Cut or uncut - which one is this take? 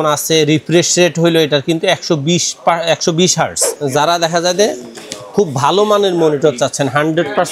cut